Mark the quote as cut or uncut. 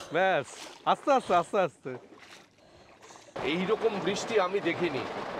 cut